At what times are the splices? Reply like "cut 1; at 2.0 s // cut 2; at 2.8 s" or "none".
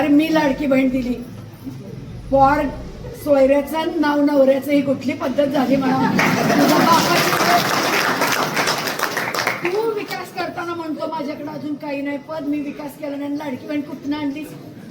none